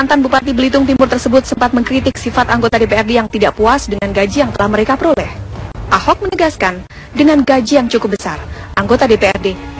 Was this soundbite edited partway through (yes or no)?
no